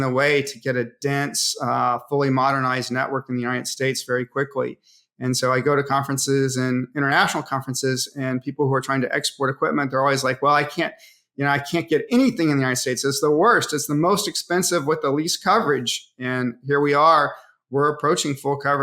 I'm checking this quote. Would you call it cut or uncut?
uncut